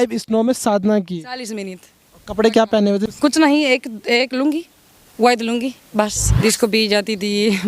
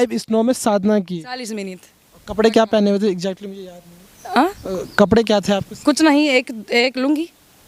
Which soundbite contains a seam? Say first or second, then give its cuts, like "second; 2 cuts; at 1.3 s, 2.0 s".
first; 2 cuts; at 3.0 s, 6.2 s